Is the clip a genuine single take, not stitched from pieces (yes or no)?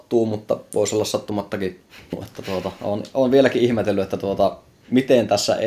no